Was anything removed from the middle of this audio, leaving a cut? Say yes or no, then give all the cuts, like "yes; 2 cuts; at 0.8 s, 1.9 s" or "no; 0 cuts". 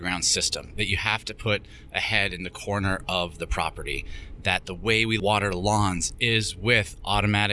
yes; 1 cut; at 5.2 s